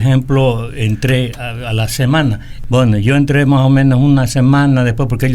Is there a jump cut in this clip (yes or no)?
yes